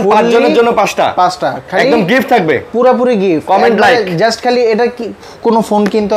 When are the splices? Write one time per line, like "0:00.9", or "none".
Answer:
none